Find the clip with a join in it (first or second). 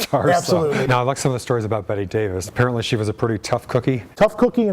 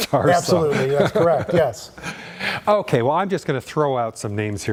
first